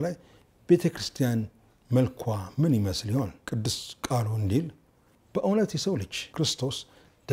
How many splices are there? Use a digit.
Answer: 2